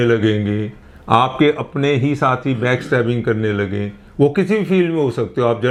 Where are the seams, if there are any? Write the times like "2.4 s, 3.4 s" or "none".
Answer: none